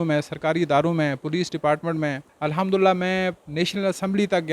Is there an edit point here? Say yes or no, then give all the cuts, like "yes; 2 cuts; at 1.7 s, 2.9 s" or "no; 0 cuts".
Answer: yes; 2 cuts; at 2.3 s, 3.4 s